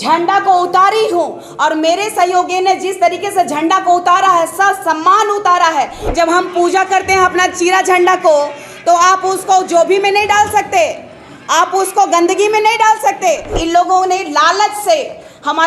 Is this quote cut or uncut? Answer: cut